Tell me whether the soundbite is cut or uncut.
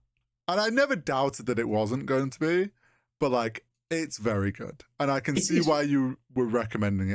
uncut